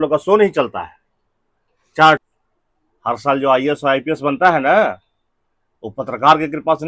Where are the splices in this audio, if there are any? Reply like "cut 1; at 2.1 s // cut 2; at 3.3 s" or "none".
cut 1; at 2.2 s